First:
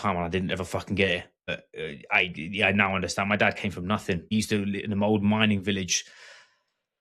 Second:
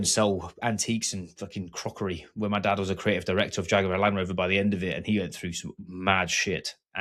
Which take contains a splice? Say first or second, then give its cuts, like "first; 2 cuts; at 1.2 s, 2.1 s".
first; 2 cuts; at 1.5 s, 4.3 s